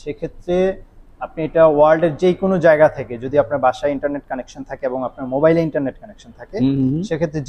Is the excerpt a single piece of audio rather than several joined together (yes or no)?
yes